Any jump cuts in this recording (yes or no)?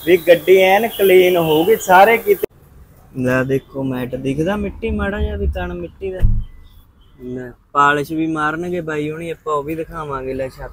yes